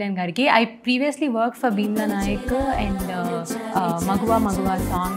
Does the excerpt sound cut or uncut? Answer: cut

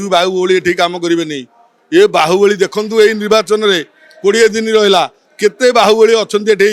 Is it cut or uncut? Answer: uncut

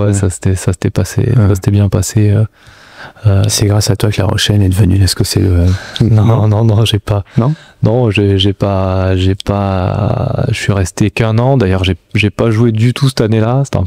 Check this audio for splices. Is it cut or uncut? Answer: uncut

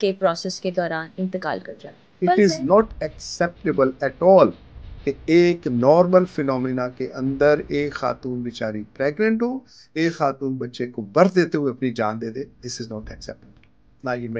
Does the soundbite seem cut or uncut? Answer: cut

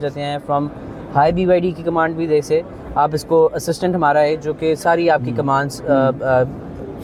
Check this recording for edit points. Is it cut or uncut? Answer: uncut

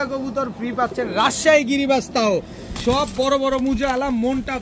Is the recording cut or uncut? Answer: uncut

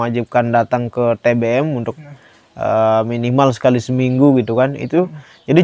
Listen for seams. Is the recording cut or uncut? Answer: uncut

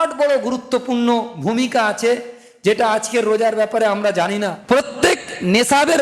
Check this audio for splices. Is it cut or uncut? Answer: cut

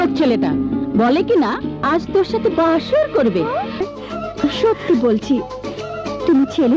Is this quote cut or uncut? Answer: cut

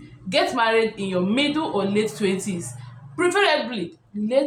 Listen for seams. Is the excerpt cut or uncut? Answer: uncut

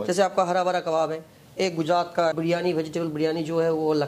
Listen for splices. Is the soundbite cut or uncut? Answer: cut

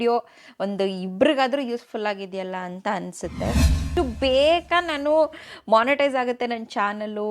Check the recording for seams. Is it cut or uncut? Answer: cut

